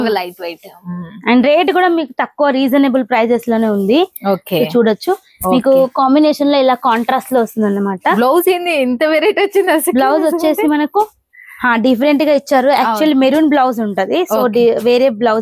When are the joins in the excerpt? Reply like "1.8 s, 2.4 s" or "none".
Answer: none